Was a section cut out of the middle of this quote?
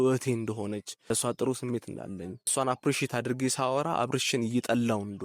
yes; 2 cuts; at 0.9 s, 2.5 s

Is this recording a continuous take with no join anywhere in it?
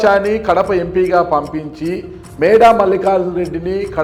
yes; 0 cuts

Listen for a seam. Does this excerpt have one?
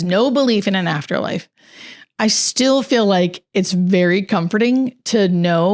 no; 0 cuts

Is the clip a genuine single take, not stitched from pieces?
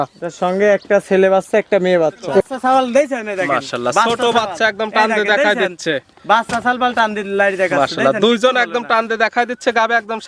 no; 1 cut; at 2.4 s

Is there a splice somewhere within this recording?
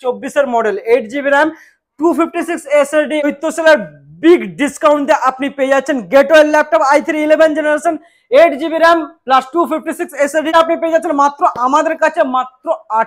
yes; 2 cuts; at 3.2 s, 10.5 s

